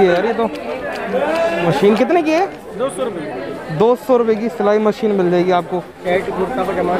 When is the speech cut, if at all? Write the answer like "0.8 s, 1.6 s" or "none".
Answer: 1.6 s, 6.0 s

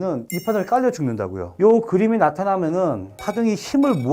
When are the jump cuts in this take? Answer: 1.4 s

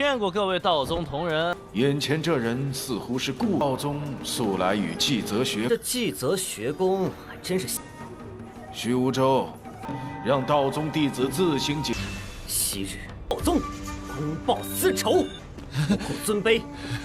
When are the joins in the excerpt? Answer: 1.5 s, 11.9 s

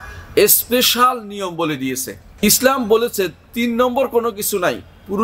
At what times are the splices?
2.4 s

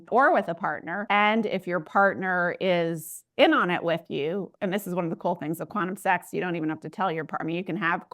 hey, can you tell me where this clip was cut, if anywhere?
0.9 s

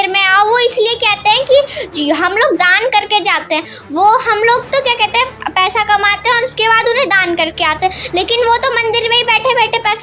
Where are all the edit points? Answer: none

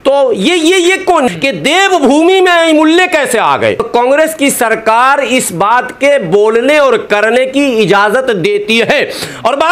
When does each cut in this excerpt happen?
1.3 s, 3.8 s

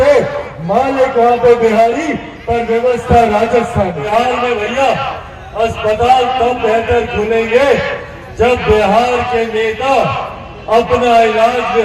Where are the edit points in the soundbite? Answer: 4.1 s

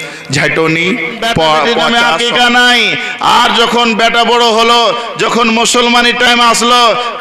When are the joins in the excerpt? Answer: 1.8 s

